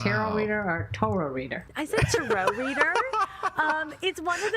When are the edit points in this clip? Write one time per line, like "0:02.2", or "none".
0:01.6